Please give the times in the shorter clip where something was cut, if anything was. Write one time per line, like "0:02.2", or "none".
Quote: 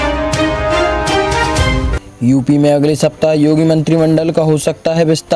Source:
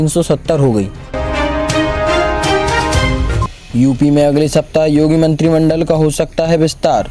0:02.0